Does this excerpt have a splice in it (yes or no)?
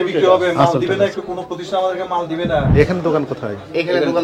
yes